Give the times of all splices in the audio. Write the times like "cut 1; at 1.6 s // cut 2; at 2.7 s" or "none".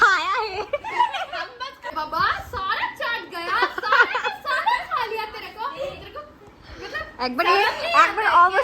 cut 1; at 1.9 s

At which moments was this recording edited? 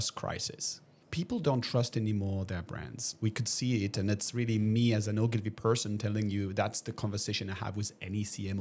cut 1; at 1.0 s

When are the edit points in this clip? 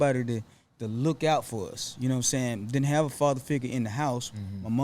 none

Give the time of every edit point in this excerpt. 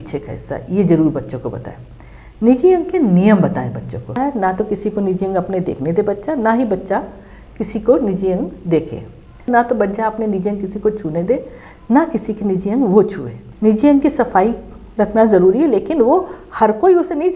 cut 1; at 4.1 s // cut 2; at 9.5 s // cut 3; at 13.4 s

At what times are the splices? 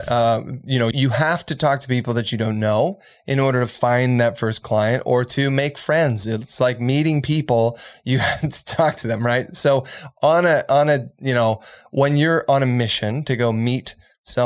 cut 1; at 0.9 s

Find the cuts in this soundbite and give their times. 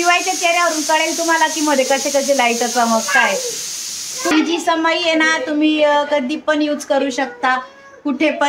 cut 1; at 4.3 s

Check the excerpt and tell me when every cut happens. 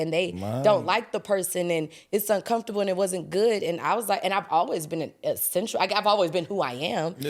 none

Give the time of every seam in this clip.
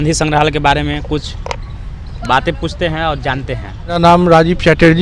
cut 1; at 4.0 s

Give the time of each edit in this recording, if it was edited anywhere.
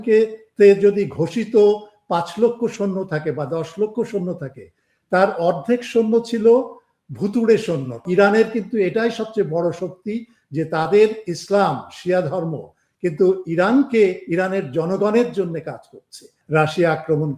cut 1; at 8.0 s // cut 2; at 16.3 s

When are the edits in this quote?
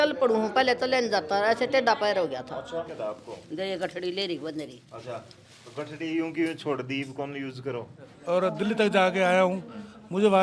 cut 1; at 2.9 s // cut 2; at 8.1 s

